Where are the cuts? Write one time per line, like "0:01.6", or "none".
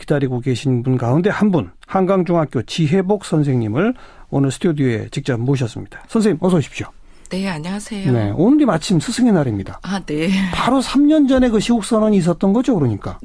0:03.9